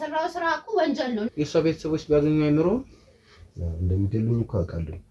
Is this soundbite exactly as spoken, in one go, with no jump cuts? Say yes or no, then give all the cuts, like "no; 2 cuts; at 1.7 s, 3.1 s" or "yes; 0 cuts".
no; 1 cut; at 1.3 s